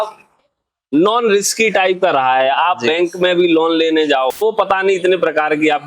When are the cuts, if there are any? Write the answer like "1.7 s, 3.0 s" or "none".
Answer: 4.4 s

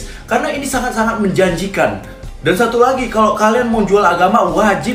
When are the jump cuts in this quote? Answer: none

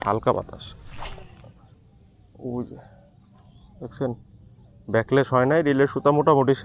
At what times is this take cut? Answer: none

